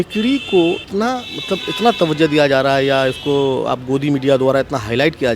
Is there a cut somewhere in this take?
yes; 1 cut; at 0.9 s

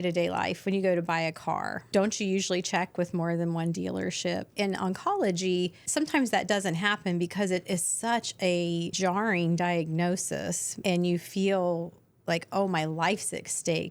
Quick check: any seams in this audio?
yes; 5 cuts; at 1.8 s, 4.5 s, 5.8 s, 8.9 s, 10.7 s

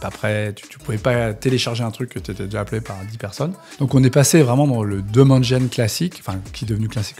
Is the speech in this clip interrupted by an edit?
yes; 1 cut; at 3.7 s

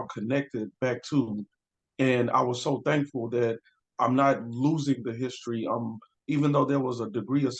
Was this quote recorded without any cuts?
yes; 0 cuts

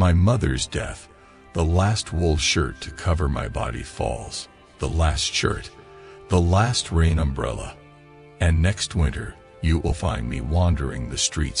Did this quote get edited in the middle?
no; 0 cuts

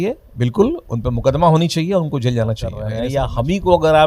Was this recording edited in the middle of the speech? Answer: yes; 1 cut; at 2.9 s

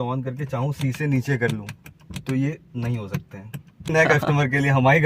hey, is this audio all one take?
no; 1 cut; at 4.0 s

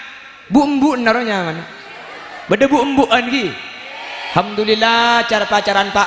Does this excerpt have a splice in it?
no; 0 cuts

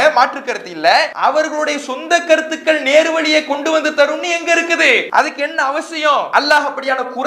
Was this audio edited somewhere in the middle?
yes; 3 cuts; at 1.1 s, 5.1 s, 6.3 s

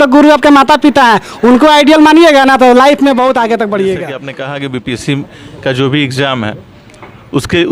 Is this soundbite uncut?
no; 1 cut; at 4.2 s

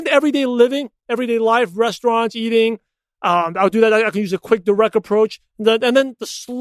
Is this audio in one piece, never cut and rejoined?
yes; 0 cuts

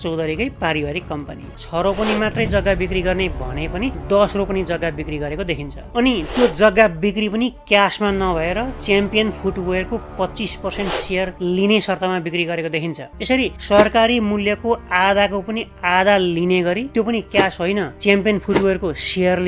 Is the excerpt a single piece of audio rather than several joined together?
no; 2 cuts; at 1.5 s, 13.0 s

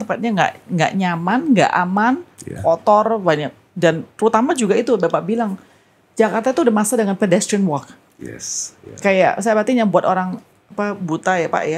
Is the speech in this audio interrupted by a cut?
no; 0 cuts

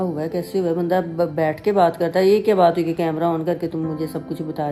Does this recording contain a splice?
no; 0 cuts

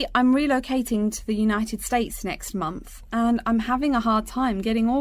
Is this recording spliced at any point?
no; 0 cuts

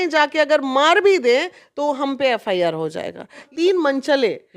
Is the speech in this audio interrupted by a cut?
yes; 1 cut; at 3.5 s

